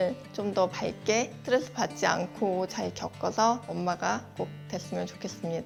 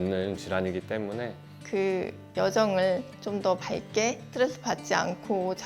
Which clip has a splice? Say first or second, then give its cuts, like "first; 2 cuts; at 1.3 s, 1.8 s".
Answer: second; 1 cut; at 1.4 s